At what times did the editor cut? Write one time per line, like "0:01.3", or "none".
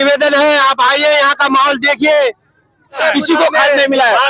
0:03.0